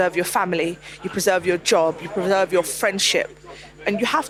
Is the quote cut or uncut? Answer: uncut